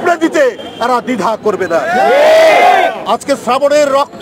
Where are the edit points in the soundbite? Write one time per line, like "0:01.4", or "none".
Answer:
0:03.0